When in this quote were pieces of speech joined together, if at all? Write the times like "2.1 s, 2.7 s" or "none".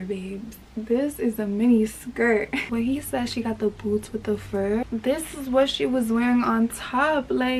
2.7 s, 4.8 s